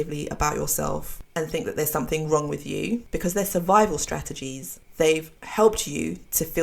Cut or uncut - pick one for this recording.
cut